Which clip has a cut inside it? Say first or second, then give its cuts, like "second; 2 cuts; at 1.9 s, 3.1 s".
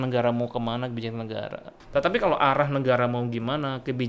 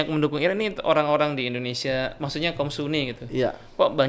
first; 1 cut; at 1.7 s